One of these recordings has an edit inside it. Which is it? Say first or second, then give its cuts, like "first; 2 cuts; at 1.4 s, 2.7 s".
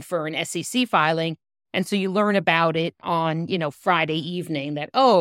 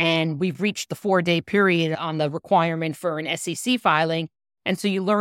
second; 1 cut; at 2.0 s